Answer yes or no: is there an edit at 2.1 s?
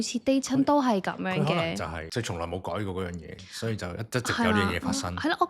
yes